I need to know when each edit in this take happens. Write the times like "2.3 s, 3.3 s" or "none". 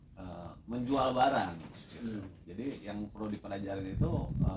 2.6 s

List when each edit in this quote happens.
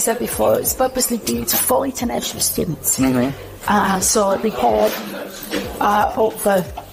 none

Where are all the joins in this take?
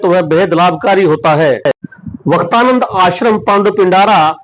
1.9 s

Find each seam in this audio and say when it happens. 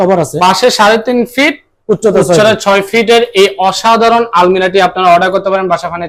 none

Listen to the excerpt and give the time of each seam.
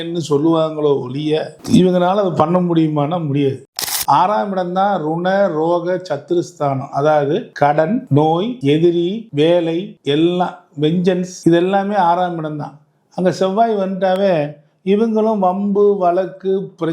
3.6 s

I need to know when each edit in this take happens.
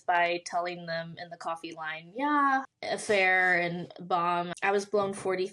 2.7 s, 4.6 s

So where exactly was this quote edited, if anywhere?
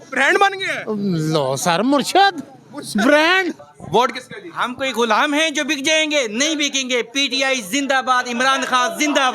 3.6 s

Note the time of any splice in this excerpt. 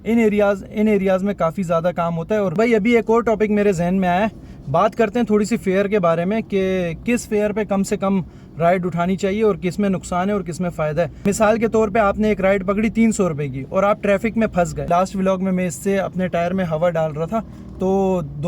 2.5 s, 11.2 s, 14.9 s

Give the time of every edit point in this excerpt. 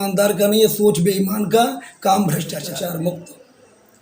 2.6 s

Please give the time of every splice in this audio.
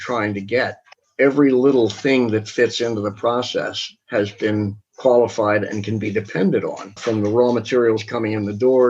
1.0 s, 6.9 s

